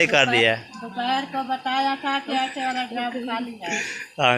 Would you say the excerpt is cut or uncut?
uncut